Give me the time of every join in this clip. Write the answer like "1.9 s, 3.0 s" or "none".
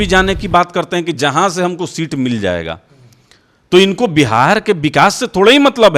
none